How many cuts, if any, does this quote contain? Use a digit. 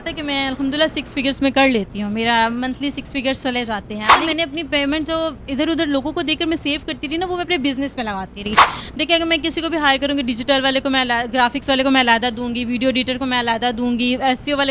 1